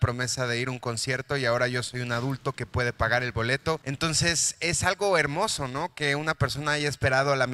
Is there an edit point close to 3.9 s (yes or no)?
yes